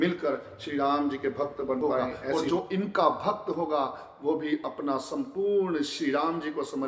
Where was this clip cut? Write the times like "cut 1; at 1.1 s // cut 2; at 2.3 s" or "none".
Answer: cut 1; at 2.1 s